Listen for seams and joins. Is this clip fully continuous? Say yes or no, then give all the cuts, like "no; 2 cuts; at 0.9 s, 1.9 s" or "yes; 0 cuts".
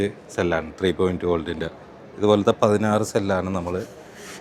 yes; 0 cuts